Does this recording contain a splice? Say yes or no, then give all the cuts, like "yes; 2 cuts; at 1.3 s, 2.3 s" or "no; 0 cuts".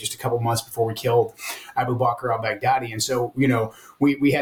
no; 0 cuts